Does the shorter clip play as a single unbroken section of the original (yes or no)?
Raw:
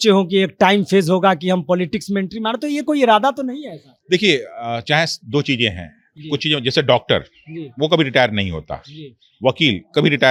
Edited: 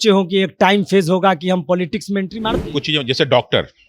no